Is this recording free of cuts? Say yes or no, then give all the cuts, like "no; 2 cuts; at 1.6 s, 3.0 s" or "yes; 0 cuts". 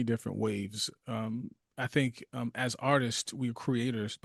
yes; 0 cuts